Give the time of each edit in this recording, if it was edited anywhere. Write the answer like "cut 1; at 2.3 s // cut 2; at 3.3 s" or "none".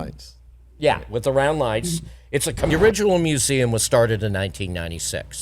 cut 1; at 2.7 s